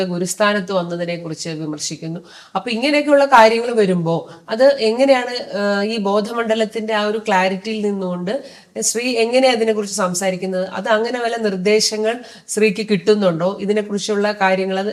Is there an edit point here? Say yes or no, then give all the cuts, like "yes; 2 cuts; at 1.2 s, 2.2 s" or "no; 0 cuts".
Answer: no; 0 cuts